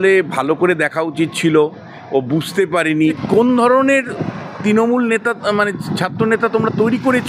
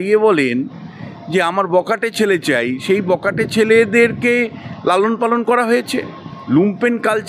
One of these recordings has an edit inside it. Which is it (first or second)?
first